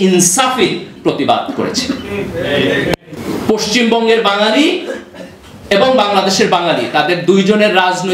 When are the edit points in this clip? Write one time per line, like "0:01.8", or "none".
0:03.2